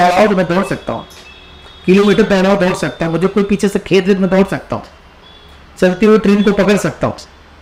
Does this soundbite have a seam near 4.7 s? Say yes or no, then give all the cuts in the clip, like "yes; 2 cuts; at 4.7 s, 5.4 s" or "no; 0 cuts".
no; 0 cuts